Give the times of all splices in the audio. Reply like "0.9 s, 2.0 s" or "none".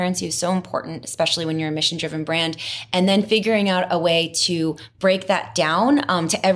none